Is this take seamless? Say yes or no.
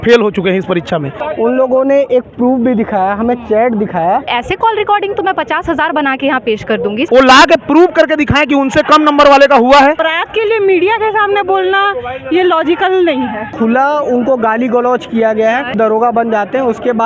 no